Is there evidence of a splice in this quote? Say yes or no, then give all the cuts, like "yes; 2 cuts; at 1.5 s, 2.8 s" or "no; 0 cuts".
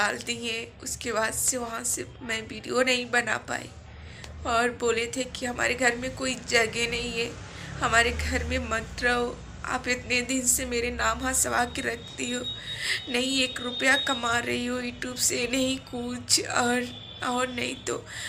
no; 0 cuts